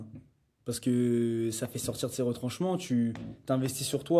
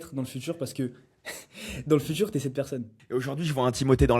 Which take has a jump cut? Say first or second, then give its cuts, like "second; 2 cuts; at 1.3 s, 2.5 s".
second; 1 cut; at 2.9 s